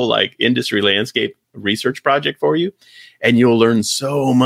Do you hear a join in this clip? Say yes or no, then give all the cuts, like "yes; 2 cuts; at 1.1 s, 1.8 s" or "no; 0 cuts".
no; 0 cuts